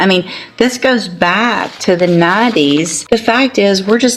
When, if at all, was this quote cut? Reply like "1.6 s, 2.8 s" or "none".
2.9 s